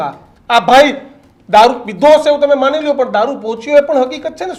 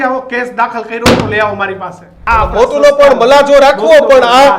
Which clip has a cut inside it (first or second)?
second